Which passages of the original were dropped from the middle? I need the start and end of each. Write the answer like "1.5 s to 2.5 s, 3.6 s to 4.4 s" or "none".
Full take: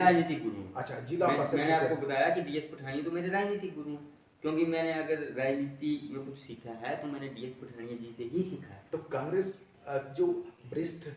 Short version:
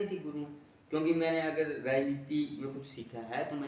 none